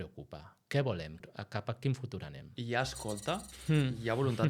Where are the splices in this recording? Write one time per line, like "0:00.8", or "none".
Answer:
0:01.2
0:03.5